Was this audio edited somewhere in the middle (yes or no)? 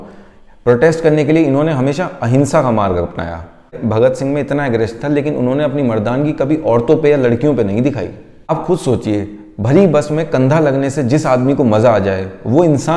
yes